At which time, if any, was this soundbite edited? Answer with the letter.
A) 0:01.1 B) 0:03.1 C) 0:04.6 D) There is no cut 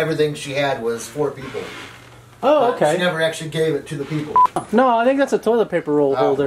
C